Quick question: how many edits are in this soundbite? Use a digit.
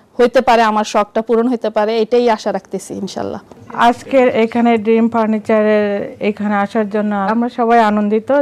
0